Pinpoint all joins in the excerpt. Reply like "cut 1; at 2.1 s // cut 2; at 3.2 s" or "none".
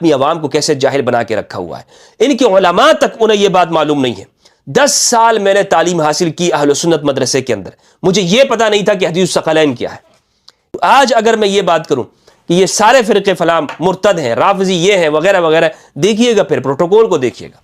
cut 1; at 10.7 s